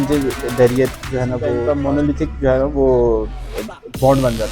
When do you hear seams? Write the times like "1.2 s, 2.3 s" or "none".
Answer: 1.6 s